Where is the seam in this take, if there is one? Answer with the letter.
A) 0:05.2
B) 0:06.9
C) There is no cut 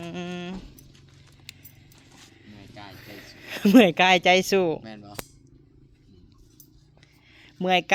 C